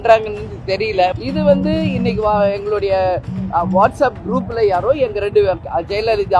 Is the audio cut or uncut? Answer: cut